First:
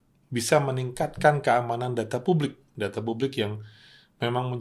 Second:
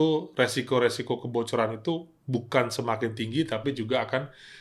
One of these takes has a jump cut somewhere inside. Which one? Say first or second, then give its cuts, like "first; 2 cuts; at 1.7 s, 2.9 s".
first; 1 cut; at 2.6 s